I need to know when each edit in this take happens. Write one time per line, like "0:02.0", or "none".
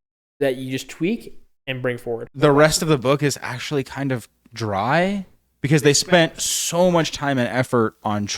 0:02.3